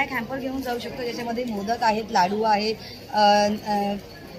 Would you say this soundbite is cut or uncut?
uncut